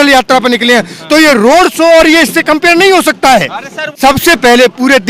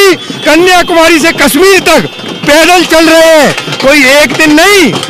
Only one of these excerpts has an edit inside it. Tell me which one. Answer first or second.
first